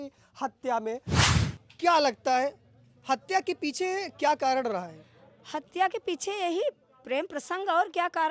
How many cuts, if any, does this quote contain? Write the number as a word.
one